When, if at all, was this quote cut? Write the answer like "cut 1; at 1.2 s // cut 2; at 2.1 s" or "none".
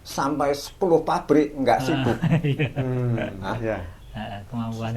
none